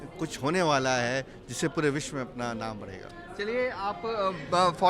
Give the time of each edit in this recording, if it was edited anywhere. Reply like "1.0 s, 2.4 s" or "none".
none